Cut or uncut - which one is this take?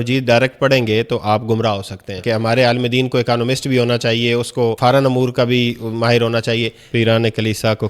cut